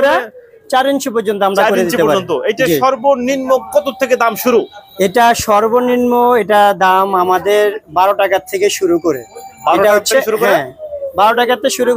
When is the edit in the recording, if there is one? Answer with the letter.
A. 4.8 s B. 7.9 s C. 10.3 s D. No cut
D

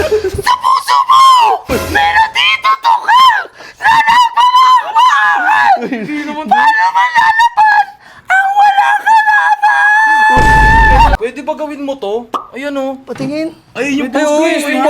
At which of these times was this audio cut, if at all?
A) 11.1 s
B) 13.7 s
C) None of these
A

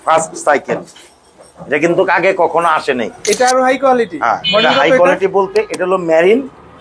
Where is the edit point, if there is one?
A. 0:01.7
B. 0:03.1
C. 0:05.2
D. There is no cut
B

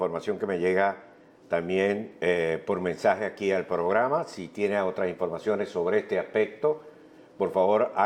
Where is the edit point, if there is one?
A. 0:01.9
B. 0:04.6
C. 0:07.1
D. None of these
C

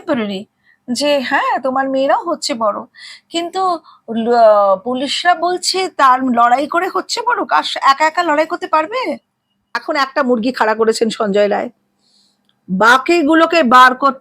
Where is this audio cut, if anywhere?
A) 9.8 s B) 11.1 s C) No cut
A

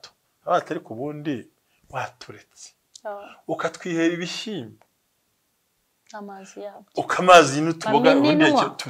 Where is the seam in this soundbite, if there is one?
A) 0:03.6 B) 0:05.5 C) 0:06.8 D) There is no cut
D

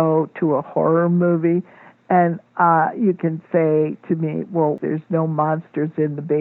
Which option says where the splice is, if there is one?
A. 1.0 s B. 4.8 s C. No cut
B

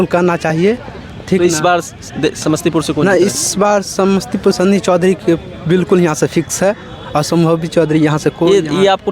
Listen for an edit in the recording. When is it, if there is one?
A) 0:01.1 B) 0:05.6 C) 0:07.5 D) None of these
D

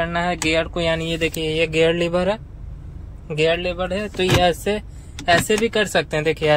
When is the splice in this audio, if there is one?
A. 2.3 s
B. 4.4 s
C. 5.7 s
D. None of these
D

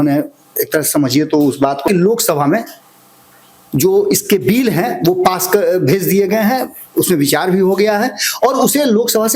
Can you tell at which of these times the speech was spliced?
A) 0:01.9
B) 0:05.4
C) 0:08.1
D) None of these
A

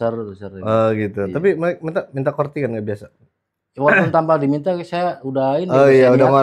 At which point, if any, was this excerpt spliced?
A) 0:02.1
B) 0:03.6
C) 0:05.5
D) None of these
D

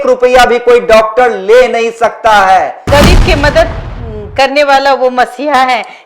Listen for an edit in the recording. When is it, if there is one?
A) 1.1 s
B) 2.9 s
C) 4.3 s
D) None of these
B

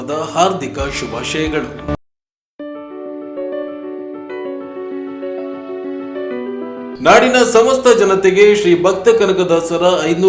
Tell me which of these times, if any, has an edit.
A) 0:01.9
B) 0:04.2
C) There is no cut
A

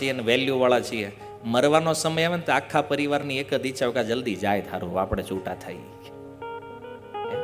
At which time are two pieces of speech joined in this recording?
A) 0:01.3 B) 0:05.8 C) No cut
C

